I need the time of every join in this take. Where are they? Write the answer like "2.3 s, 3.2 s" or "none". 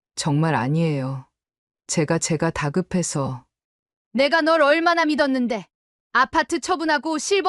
none